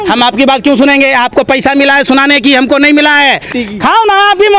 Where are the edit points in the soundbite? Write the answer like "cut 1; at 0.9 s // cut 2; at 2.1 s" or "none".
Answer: cut 1; at 3.5 s